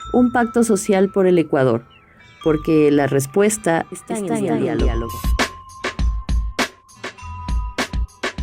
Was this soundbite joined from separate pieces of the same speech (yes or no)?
yes